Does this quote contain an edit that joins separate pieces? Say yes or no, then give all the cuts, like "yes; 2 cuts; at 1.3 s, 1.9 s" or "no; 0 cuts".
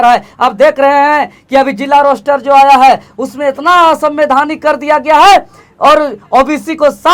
no; 0 cuts